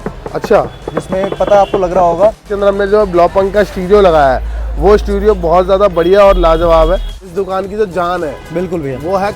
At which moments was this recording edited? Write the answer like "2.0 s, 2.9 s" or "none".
2.4 s, 7.2 s